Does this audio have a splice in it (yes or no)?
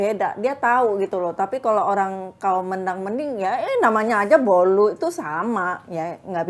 no